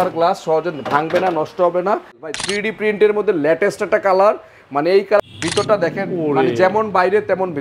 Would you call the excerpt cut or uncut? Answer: cut